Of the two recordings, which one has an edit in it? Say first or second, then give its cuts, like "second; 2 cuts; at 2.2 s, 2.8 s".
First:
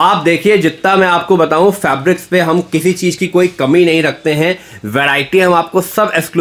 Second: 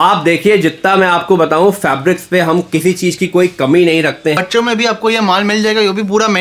second; 1 cut; at 4.4 s